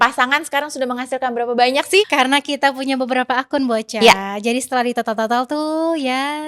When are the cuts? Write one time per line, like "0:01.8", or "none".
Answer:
0:02.1